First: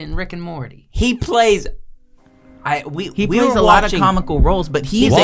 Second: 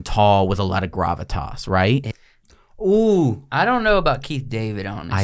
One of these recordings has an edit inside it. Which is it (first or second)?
second